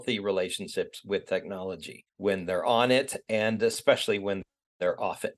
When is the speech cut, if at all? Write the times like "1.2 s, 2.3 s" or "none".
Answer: none